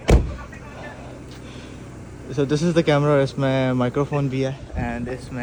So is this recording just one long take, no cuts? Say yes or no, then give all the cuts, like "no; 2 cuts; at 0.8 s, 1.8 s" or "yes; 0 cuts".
yes; 0 cuts